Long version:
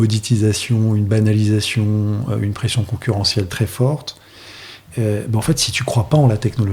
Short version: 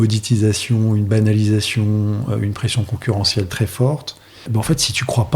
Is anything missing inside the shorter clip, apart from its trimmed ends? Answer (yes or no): yes